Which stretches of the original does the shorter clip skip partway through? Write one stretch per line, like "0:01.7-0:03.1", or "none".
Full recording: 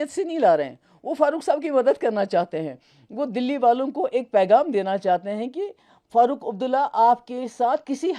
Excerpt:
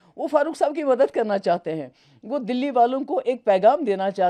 none